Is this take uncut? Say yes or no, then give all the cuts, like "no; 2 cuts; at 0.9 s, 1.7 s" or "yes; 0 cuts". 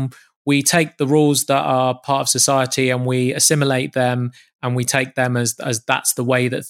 yes; 0 cuts